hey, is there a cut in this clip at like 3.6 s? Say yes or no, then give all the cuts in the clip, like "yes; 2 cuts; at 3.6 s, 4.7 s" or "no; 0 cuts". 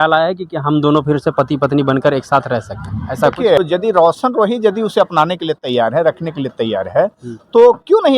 yes; 1 cut; at 3.6 s